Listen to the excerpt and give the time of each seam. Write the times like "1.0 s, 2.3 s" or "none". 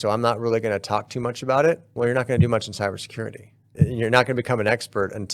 1.9 s, 3.7 s